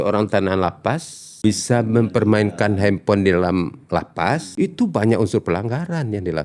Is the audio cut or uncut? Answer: cut